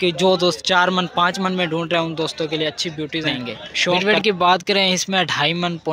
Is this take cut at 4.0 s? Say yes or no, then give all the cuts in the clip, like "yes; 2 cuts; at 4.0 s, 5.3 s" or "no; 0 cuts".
yes; 1 cut; at 4.0 s